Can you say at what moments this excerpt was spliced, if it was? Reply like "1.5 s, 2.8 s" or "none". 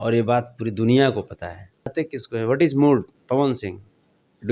1.9 s